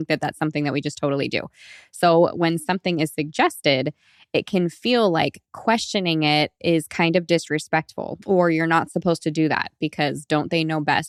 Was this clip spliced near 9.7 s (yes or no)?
no